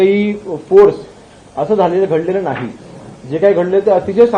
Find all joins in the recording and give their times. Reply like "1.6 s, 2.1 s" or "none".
none